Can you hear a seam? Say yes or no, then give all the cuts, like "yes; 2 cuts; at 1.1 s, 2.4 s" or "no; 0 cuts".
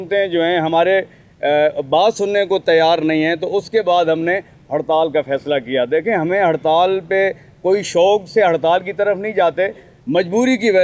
no; 0 cuts